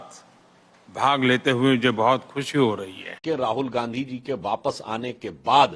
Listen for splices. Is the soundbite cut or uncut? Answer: cut